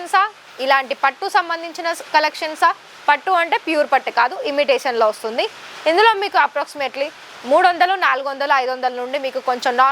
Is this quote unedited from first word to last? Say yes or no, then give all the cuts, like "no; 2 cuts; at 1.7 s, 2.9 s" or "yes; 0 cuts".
yes; 0 cuts